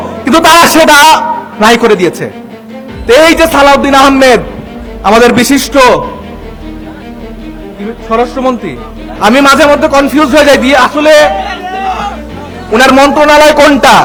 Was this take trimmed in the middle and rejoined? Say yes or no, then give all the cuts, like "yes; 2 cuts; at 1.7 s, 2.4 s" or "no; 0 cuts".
no; 0 cuts